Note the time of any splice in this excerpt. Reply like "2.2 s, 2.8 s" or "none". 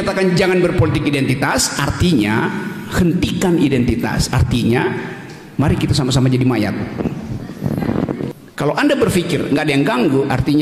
8.3 s